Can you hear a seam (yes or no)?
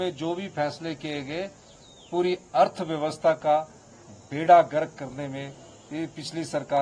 no